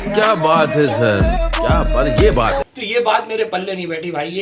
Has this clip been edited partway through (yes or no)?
yes